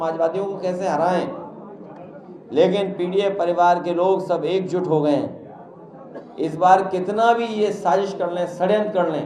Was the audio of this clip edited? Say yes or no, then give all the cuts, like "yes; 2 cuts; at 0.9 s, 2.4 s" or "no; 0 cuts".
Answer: no; 0 cuts